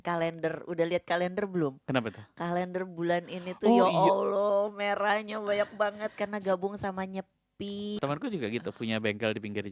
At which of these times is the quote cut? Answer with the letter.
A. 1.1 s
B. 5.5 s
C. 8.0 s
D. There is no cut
C